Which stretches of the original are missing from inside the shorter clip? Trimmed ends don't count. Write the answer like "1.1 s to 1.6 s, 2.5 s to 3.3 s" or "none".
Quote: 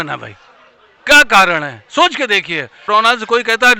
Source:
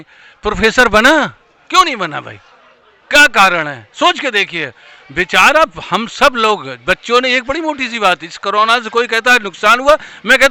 4.8 s to 8.4 s